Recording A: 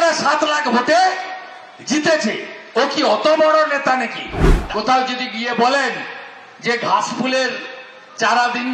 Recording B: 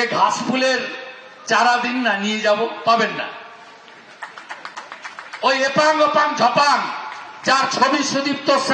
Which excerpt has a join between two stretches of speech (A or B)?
A